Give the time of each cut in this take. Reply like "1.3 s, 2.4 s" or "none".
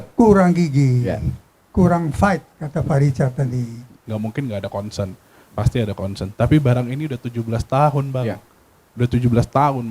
4.1 s